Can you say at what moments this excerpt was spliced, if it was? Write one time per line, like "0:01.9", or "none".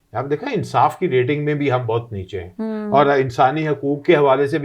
none